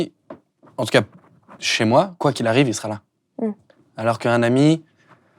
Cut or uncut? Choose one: cut